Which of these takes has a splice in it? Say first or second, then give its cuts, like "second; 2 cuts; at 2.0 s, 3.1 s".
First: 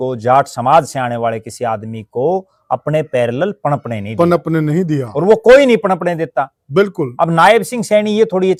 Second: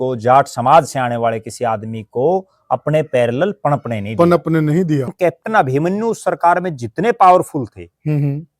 second; 1 cut; at 5.1 s